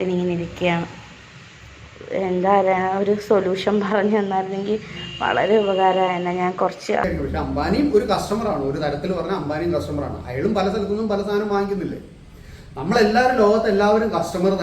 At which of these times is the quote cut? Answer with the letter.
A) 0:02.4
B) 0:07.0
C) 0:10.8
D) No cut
B